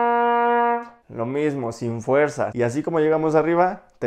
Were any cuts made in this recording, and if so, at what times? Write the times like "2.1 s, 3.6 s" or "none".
1.0 s, 2.5 s